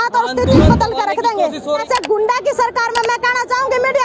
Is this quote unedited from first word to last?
no; 1 cut; at 1.6 s

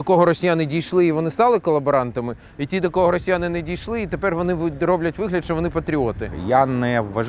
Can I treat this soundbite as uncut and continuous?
no; 1 cut; at 6.3 s

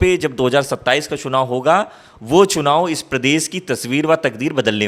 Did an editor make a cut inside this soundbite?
no; 0 cuts

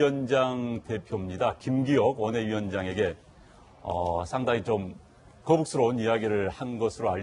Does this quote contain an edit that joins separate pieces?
no; 0 cuts

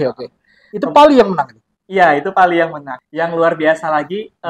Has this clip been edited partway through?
yes; 1 cut; at 2.9 s

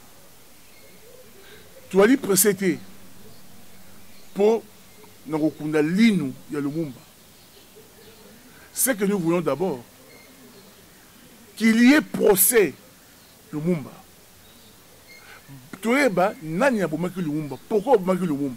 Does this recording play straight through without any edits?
yes; 0 cuts

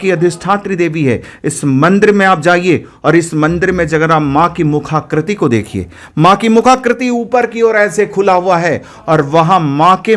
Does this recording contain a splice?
no; 0 cuts

